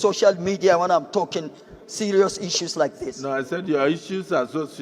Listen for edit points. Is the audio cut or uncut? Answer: uncut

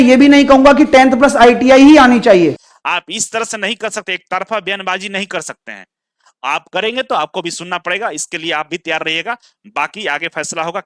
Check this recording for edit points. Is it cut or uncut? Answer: cut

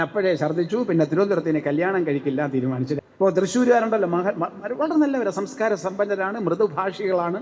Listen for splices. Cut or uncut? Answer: cut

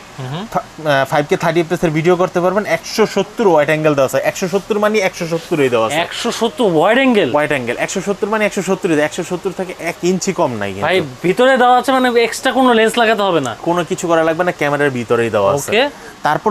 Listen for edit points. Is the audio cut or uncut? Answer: uncut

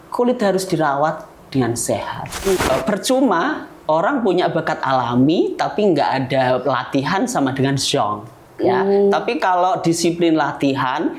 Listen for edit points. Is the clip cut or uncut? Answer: cut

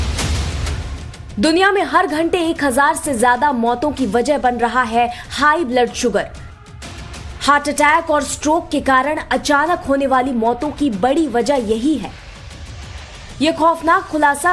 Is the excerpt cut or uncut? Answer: uncut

